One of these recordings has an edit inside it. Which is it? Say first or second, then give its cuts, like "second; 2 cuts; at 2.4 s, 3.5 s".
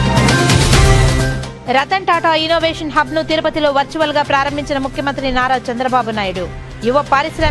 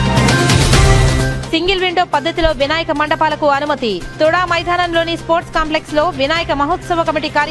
first; 1 cut; at 1.4 s